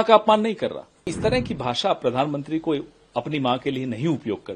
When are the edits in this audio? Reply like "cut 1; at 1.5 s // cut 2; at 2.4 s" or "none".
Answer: cut 1; at 1.1 s